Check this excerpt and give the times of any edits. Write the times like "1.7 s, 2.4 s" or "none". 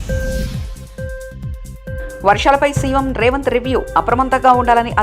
2.0 s